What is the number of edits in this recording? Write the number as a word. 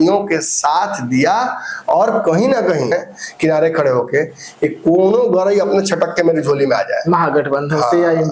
one